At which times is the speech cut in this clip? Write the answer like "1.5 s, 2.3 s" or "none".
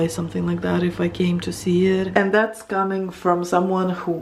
2.1 s